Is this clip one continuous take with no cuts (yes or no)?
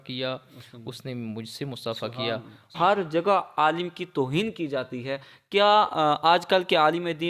no